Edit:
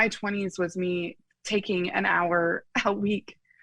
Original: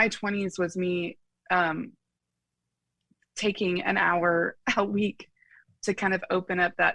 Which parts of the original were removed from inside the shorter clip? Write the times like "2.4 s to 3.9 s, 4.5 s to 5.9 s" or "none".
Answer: 1.3 s to 3.2 s